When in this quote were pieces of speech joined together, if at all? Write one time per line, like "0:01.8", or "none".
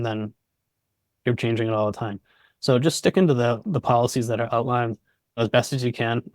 0:05.4